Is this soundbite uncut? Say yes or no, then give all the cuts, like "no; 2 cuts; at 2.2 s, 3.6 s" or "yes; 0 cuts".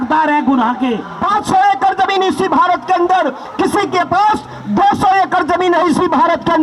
no; 1 cut; at 1.1 s